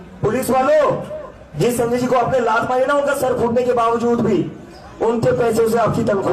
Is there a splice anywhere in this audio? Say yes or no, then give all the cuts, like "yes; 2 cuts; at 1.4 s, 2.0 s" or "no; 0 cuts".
yes; 1 cut; at 1.4 s